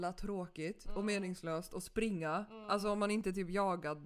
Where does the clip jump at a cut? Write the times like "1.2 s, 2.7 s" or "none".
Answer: none